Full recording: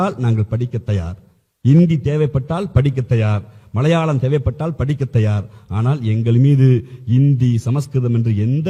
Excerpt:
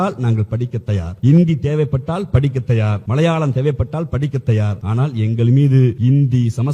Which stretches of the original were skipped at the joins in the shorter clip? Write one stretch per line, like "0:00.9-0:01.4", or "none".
0:01.1-0:01.5
0:03.4-0:03.7
0:05.5-0:05.7
0:06.8-0:07.1